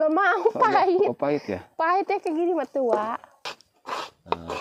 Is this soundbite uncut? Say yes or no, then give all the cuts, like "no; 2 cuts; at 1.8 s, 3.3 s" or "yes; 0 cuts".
no; 1 cut; at 3.4 s